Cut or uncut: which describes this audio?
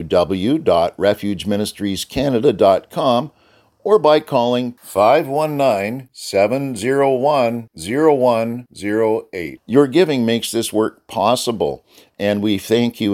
uncut